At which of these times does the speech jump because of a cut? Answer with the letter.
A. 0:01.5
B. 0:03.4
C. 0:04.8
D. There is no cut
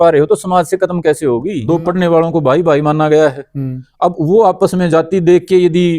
A